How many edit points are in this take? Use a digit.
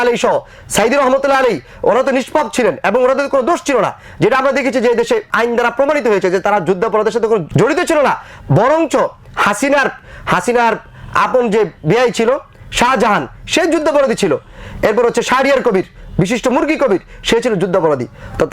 2